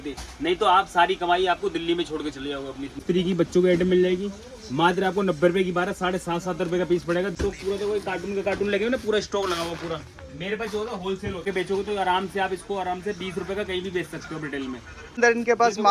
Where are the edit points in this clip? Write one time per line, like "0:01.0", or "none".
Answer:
0:03.0
0:07.3
0:11.5
0:15.2

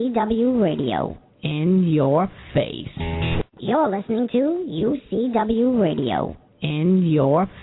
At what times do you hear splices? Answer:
0:03.4

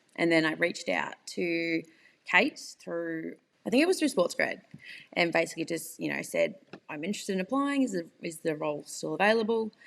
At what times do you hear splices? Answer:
0:03.4

